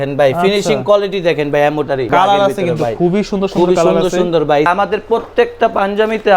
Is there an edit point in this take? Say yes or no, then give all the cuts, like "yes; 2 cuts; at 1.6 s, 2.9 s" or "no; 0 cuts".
yes; 2 cuts; at 2.1 s, 4.7 s